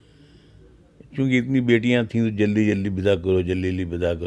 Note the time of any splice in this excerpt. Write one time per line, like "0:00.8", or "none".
none